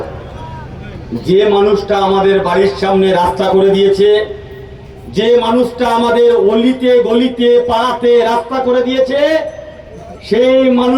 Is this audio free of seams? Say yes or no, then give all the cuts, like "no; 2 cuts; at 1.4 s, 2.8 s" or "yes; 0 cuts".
yes; 0 cuts